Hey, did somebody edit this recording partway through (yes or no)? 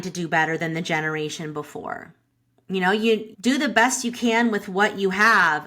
yes